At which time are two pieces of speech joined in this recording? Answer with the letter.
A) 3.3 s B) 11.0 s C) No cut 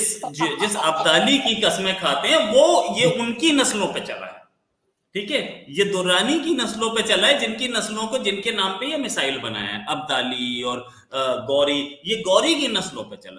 C